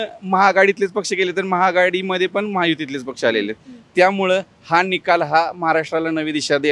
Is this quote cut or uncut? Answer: uncut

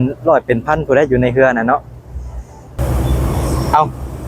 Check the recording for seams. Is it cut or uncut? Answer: cut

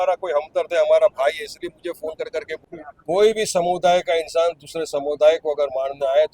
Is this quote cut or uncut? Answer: cut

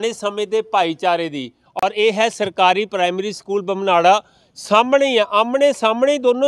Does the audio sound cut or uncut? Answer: cut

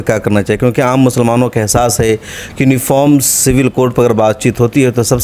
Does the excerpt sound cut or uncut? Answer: uncut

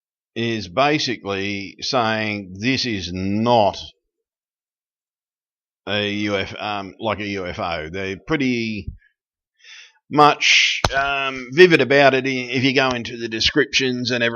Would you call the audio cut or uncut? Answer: cut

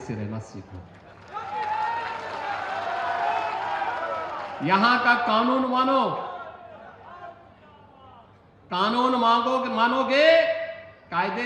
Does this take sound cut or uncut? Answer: uncut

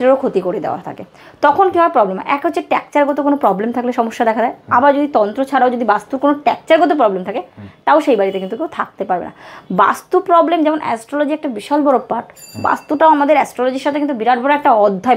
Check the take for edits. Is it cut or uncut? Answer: uncut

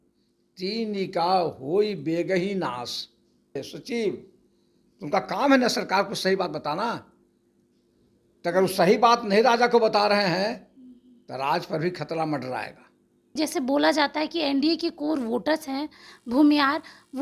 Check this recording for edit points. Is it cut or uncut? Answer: cut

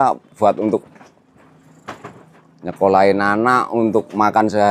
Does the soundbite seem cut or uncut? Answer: uncut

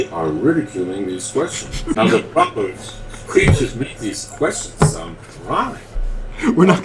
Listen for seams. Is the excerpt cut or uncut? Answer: cut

